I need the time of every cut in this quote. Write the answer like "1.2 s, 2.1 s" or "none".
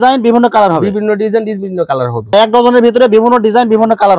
none